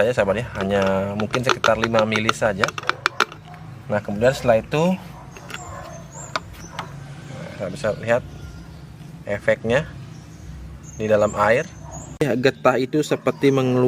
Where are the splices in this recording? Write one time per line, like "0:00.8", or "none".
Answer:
0:12.2